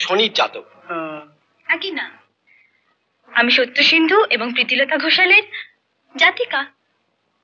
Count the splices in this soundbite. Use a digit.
0